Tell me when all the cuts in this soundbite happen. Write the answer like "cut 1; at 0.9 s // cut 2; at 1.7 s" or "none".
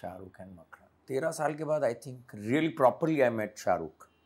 cut 1; at 1.0 s